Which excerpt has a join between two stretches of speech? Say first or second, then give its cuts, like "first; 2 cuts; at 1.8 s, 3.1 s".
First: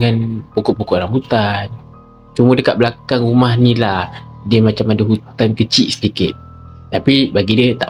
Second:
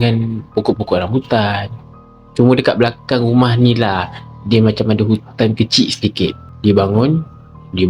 second; 1 cut; at 6.5 s